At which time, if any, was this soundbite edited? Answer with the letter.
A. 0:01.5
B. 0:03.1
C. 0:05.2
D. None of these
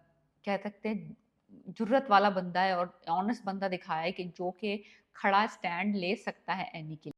D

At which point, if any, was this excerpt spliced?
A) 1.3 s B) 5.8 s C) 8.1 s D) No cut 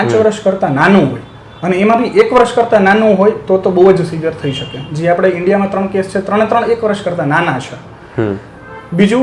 D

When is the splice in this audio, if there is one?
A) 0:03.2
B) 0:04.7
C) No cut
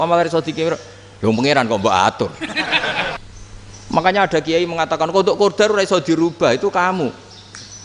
A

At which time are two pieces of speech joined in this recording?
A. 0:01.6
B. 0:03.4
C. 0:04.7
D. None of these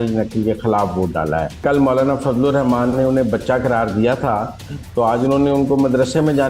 A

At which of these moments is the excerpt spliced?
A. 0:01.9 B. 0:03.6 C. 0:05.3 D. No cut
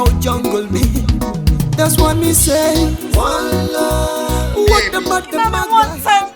C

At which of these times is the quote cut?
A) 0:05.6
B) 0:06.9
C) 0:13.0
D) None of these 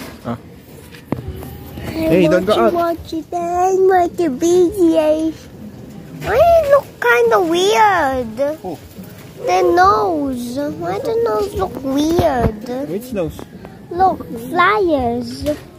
D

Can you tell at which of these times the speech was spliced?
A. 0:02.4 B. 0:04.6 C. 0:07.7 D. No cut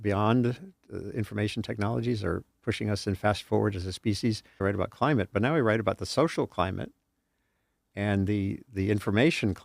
B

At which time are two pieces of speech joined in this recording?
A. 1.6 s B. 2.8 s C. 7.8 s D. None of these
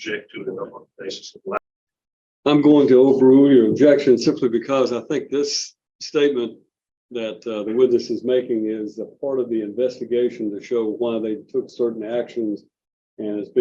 A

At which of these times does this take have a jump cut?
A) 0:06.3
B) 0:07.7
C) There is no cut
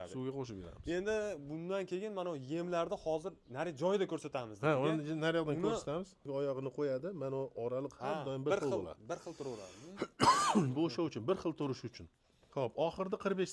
A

